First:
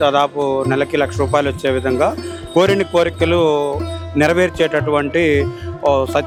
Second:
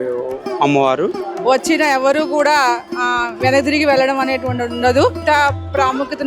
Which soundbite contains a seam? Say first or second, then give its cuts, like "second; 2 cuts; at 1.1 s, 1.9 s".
second; 2 cuts; at 1.3 s, 5.2 s